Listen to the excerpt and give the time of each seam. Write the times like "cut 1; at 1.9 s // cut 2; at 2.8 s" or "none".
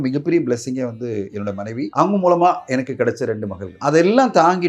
cut 1; at 1.9 s // cut 2; at 3.8 s